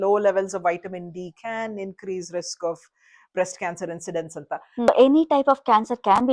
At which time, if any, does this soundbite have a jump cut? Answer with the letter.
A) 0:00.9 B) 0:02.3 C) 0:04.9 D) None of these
C